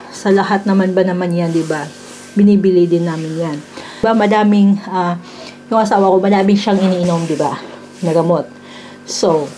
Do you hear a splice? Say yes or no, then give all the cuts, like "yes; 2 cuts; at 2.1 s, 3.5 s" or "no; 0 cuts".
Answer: yes; 1 cut; at 4.0 s